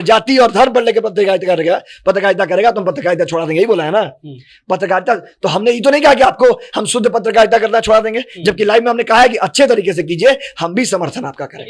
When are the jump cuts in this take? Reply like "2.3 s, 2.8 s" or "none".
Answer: none